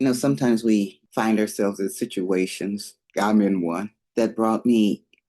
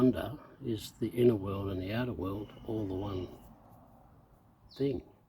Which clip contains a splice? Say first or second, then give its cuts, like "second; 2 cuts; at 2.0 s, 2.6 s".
first; 3 cuts; at 1.0 s, 3.0 s, 4.0 s